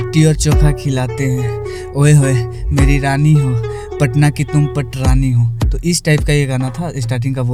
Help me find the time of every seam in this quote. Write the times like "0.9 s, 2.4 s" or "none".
none

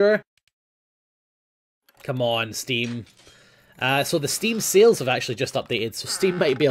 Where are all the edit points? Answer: 4.5 s

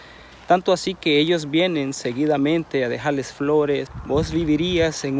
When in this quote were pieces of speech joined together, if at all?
3.9 s

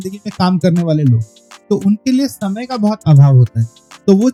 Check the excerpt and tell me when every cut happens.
none

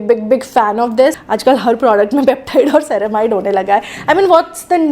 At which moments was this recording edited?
1.2 s

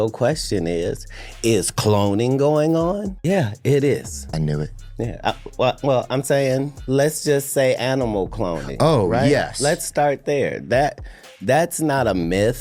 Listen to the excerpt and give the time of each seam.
3.1 s, 4.2 s, 6.8 s

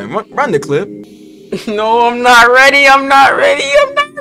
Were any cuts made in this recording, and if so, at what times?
1.0 s

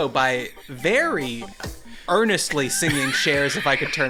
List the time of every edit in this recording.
none

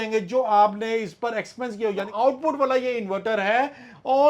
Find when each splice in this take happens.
2.1 s

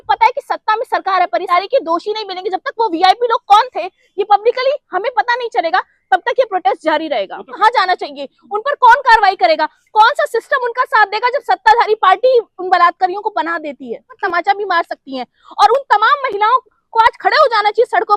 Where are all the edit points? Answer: 1.5 s, 7.5 s, 14.2 s

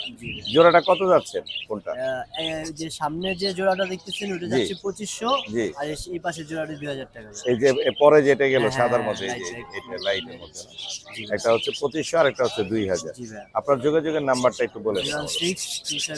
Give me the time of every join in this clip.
none

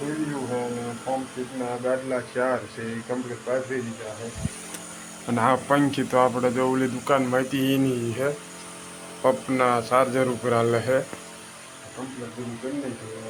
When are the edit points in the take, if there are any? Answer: none

